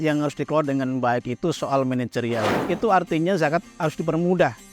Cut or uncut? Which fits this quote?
cut